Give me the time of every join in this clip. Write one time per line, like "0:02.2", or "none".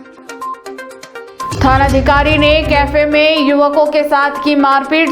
none